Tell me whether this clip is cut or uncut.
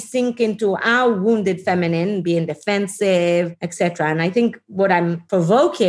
cut